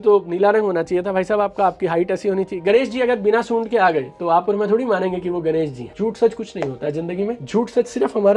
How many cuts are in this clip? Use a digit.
1